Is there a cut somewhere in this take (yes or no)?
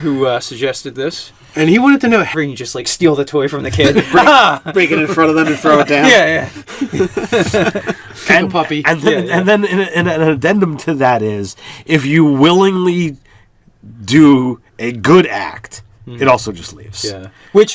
no